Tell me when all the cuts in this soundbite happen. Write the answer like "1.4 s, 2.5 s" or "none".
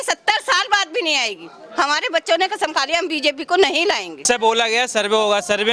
4.2 s